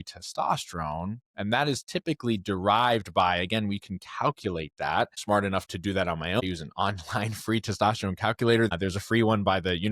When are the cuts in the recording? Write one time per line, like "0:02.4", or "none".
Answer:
0:05.2
0:06.4
0:08.7